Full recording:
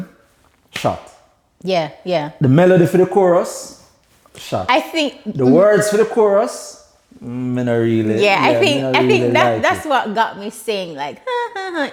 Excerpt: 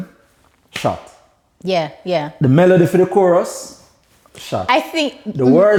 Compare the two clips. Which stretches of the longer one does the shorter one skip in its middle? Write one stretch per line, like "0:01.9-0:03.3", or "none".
none